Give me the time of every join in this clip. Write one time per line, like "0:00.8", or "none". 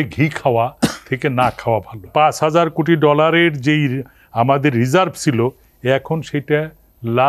0:02.1